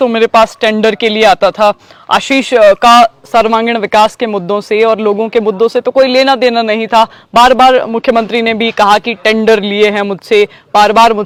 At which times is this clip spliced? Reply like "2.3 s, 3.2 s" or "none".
none